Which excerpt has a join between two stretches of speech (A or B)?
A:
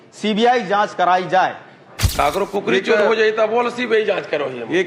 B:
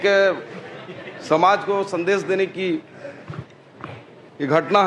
A